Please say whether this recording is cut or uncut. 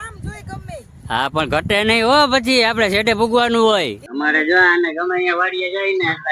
cut